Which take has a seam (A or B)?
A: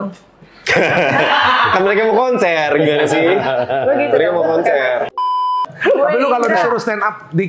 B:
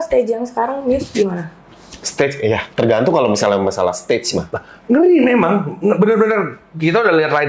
A